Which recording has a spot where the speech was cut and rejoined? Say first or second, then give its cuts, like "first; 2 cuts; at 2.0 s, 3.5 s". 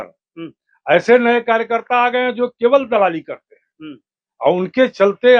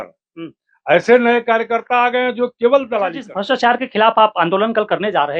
second; 1 cut; at 3.3 s